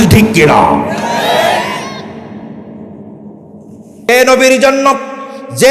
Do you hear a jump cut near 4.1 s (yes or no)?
yes